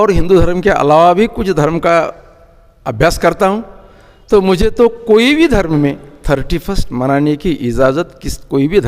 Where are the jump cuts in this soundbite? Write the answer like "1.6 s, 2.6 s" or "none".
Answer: none